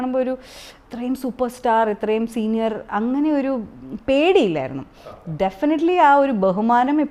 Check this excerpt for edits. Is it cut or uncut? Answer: uncut